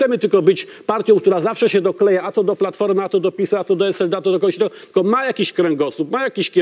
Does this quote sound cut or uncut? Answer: uncut